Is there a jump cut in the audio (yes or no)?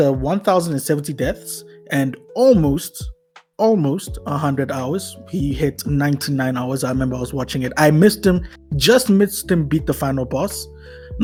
no